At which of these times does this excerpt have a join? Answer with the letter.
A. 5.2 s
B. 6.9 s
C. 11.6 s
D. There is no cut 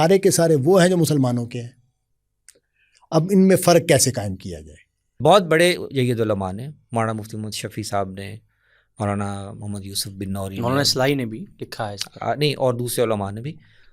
A